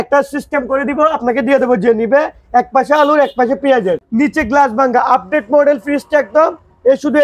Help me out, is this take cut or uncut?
cut